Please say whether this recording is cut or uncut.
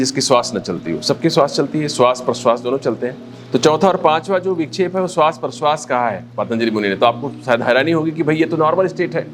uncut